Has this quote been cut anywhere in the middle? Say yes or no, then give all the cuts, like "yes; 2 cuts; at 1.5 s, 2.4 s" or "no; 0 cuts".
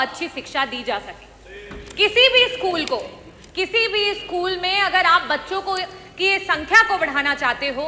no; 0 cuts